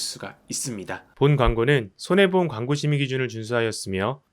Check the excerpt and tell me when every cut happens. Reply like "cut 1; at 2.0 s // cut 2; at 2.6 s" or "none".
cut 1; at 1.1 s